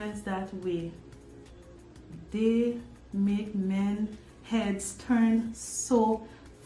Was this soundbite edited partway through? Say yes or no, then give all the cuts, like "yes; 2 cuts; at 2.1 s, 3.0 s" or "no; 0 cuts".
no; 0 cuts